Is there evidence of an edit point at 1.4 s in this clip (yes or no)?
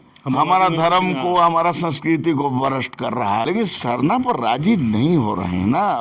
no